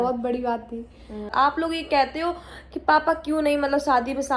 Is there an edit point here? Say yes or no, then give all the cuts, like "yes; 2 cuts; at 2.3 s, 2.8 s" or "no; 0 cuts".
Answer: yes; 1 cut; at 1.3 s